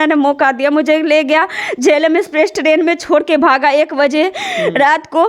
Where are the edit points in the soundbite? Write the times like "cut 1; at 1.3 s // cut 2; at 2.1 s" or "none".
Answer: none

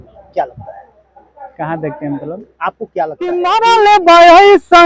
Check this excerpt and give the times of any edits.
cut 1; at 3.7 s

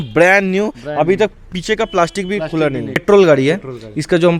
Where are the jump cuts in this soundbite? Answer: cut 1; at 3.0 s

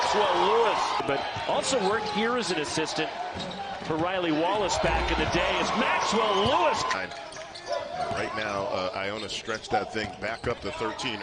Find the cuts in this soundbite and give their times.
cut 1; at 1.0 s // cut 2; at 6.9 s

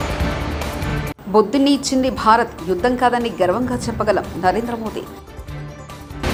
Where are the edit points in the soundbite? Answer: none

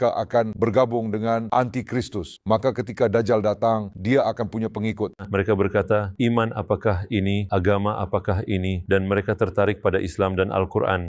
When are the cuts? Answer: cut 1; at 5.2 s

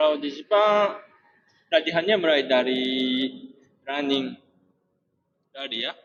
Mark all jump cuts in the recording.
none

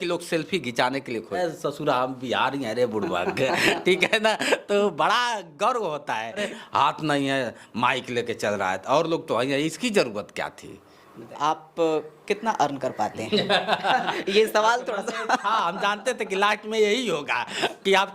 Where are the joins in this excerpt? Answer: cut 1; at 1.4 s // cut 2; at 6.5 s // cut 3; at 11.3 s

